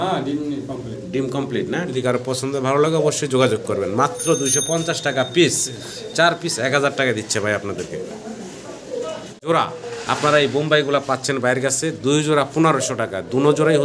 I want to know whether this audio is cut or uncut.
cut